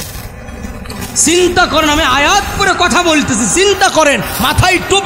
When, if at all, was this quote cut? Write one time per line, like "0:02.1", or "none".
none